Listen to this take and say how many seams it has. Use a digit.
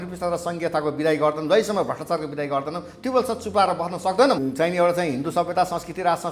1